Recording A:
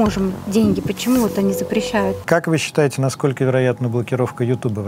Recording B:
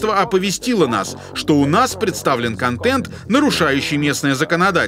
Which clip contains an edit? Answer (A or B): A